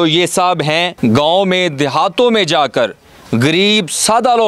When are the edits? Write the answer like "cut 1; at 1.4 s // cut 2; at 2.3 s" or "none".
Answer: cut 1; at 0.9 s